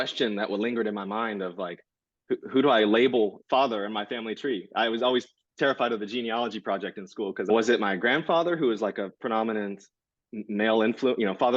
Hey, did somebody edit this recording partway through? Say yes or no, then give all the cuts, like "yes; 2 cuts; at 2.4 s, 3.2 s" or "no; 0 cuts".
yes; 1 cut; at 7.5 s